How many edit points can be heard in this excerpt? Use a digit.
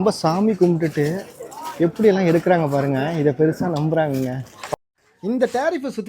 1